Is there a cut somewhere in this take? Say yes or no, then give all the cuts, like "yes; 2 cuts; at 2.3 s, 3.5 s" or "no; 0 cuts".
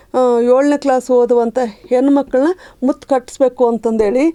no; 0 cuts